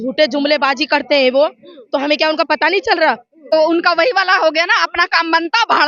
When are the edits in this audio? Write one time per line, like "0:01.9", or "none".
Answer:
0:03.5